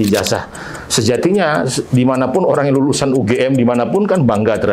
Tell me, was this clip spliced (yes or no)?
no